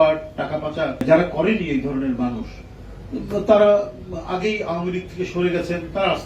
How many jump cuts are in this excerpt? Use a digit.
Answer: 1